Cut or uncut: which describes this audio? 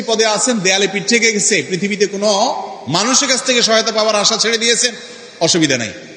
uncut